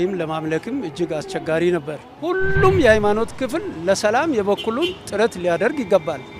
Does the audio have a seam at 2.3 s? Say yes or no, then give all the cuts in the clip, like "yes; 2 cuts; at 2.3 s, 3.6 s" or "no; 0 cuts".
yes; 1 cut; at 2.3 s